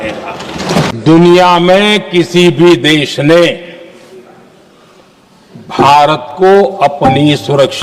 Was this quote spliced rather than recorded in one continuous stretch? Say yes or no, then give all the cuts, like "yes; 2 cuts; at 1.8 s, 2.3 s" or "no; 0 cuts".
yes; 1 cut; at 0.9 s